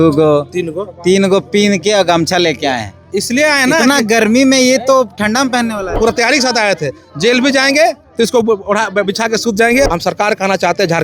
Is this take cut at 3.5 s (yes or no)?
no